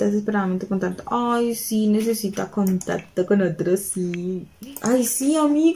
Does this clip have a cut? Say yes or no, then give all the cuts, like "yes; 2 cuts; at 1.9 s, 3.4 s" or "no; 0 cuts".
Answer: yes; 1 cut; at 4.5 s